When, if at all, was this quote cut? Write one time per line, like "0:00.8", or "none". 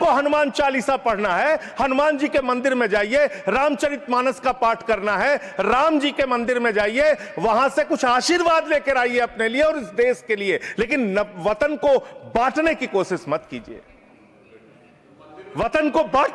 none